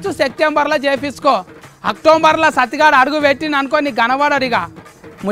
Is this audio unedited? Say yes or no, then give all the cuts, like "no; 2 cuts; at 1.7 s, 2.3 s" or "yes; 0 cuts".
yes; 0 cuts